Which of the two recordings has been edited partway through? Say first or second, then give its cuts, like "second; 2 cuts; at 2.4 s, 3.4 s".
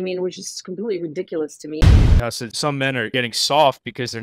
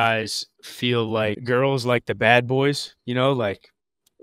first; 1 cut; at 2.1 s